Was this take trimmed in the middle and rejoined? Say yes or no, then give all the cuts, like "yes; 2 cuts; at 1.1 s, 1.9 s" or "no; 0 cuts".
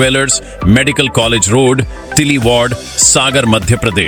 no; 0 cuts